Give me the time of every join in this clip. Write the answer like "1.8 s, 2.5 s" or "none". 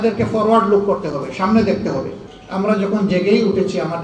2.2 s